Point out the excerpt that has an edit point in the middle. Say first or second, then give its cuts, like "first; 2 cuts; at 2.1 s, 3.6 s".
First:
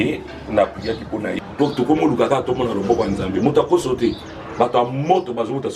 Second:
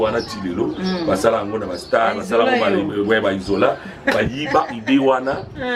first; 1 cut; at 1.4 s